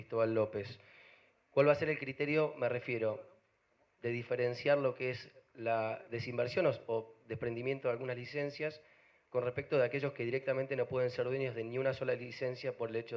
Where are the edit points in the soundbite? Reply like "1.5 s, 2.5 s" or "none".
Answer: none